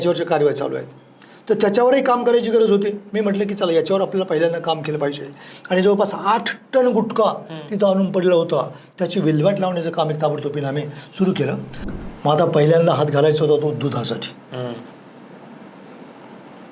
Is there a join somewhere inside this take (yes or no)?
yes